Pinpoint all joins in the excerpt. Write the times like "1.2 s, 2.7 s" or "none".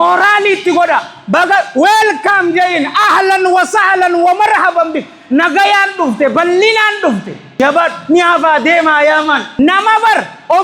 7.6 s, 9.5 s